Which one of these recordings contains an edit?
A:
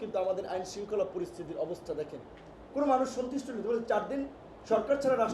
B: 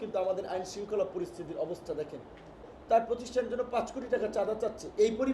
B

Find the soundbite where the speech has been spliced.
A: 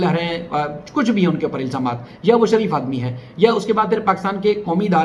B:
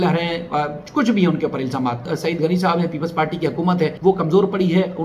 B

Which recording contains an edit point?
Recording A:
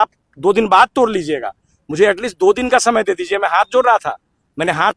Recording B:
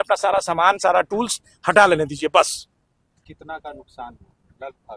B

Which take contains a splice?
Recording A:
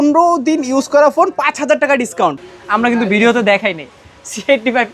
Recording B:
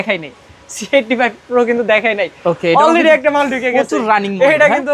A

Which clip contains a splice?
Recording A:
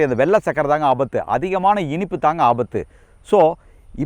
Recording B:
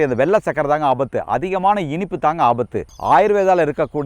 B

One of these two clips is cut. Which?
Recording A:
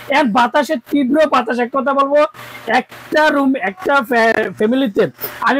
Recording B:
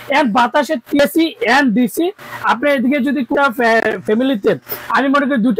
B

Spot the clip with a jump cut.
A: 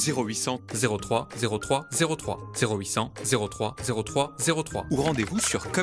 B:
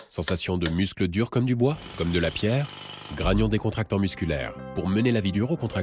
A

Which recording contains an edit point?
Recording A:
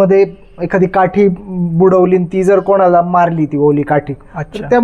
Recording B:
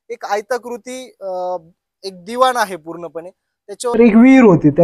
B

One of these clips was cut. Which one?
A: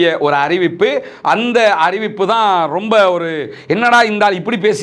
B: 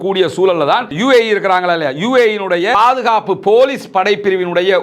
B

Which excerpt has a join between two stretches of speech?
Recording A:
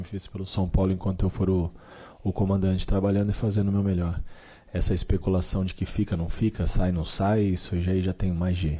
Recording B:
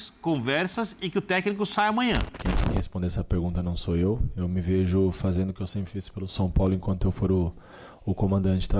B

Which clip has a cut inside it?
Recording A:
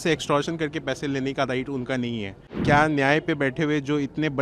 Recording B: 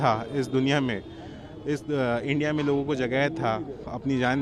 A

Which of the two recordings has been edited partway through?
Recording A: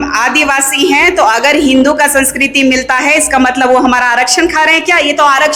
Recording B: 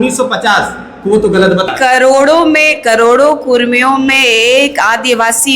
B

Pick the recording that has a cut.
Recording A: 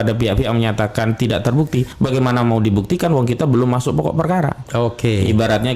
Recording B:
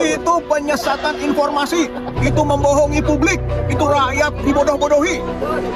A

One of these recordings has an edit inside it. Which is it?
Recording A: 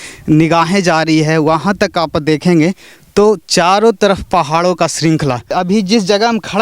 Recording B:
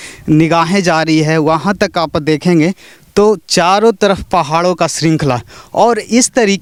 A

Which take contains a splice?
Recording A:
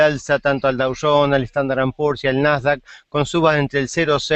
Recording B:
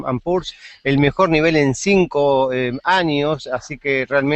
A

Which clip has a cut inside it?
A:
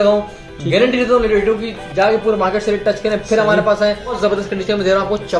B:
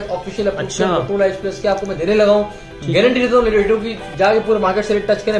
A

